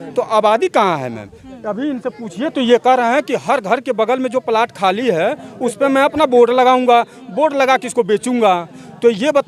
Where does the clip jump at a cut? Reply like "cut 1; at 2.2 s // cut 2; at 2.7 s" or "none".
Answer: none